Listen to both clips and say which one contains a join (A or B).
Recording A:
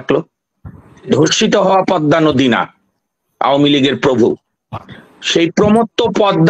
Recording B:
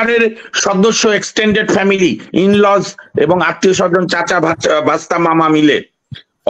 A